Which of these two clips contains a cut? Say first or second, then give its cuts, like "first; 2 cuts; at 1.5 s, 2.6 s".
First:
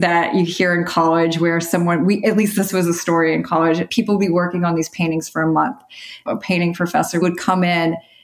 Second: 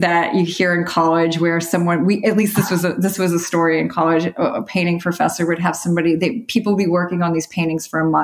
first; 4 cuts; at 2.5 s, 3.9 s, 6.2 s, 7.2 s